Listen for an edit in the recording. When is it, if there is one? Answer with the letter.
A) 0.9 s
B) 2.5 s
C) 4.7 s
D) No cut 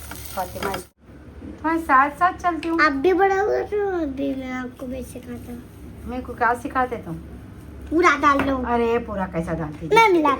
A